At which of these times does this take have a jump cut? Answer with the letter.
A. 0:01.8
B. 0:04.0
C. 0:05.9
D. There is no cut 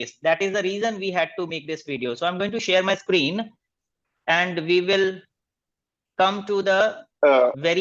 D